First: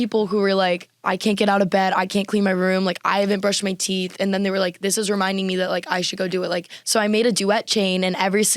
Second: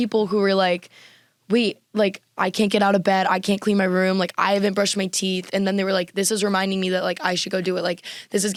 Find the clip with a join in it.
first; 2 cuts; at 0.9 s, 6.7 s

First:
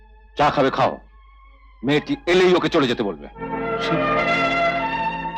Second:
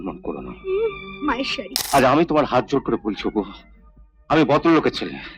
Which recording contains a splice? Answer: second; 1 cut; at 1.7 s

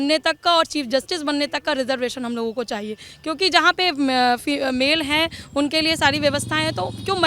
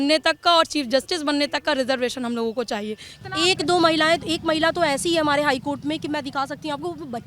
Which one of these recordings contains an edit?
second; 1 cut; at 3.1 s

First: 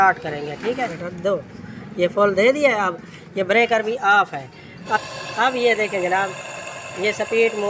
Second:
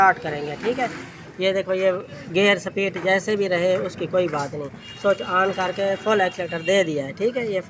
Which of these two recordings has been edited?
first; 2 cuts; at 1.0 s, 5.0 s

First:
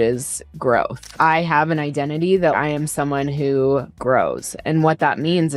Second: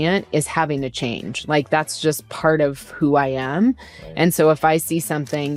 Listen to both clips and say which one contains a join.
first; 3 cuts; at 1.0 s, 2.6 s, 3.9 s

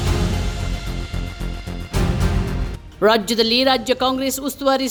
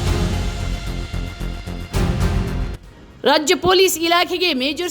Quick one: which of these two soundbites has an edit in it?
second; 1 cut; at 2.6 s

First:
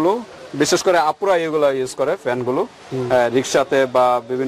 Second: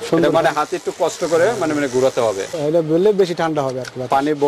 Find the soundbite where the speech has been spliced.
second; 1 cut; at 2.5 s

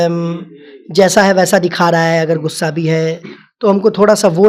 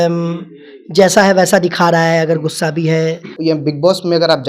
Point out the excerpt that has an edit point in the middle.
second; 1 cut; at 3.3 s

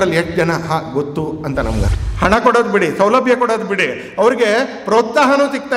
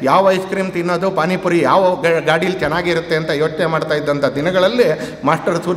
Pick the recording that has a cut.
first; 1 cut; at 1.9 s

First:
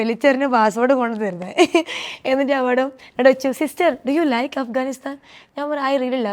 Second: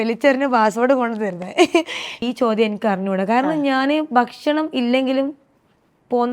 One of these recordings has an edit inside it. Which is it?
second; 1 cut; at 2.2 s

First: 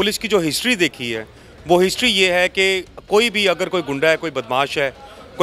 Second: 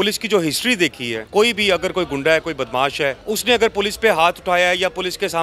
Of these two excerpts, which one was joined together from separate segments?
second; 2 cuts; at 1.2 s, 3.2 s

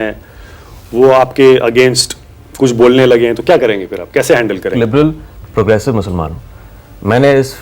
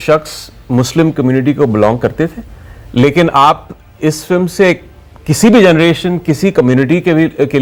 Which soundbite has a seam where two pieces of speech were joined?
first; 1 cut; at 4.7 s

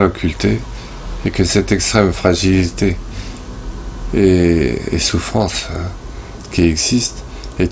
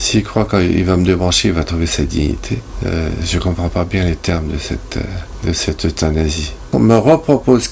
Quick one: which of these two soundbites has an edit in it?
second; 3 cuts; at 2.7 s, 5.2 s, 6.7 s

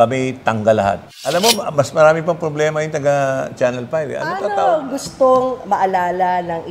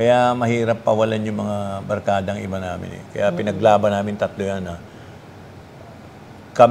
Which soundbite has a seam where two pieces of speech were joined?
first; 2 cuts; at 1.1 s, 4.5 s

